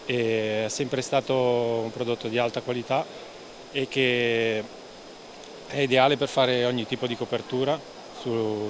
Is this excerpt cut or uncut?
uncut